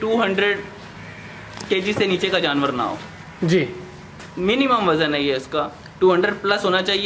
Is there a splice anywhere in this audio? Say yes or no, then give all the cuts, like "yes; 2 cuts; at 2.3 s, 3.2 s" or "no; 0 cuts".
no; 0 cuts